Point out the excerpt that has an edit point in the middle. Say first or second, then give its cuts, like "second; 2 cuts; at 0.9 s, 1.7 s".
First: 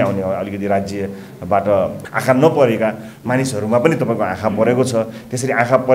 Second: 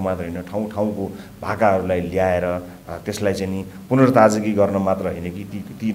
first; 1 cut; at 2.0 s